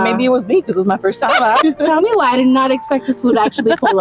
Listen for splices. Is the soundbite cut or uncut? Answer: cut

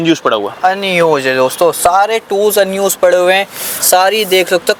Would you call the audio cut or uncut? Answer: uncut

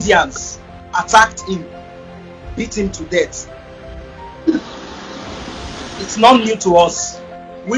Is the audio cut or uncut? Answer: uncut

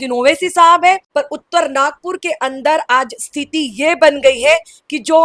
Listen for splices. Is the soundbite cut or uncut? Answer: cut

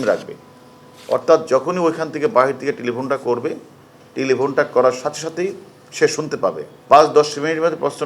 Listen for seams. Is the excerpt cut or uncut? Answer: cut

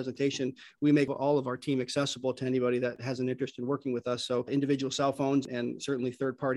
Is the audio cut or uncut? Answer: cut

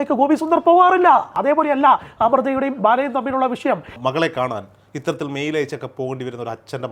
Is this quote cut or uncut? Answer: cut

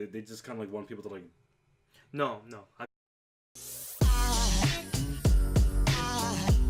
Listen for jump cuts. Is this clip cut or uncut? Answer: uncut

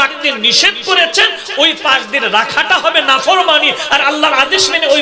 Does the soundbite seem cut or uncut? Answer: uncut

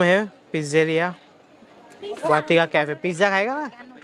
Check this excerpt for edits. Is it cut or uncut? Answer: uncut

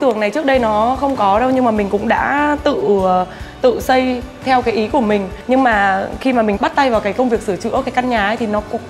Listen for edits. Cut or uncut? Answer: uncut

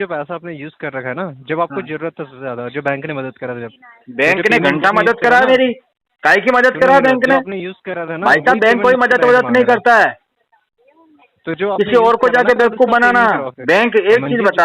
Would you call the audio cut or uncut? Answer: uncut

